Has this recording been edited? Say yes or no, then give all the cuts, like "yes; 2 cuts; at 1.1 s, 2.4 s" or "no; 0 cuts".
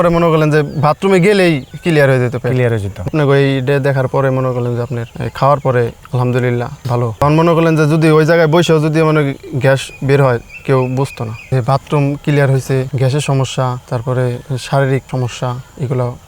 yes; 3 cuts; at 3.1 s, 7.2 s, 11.5 s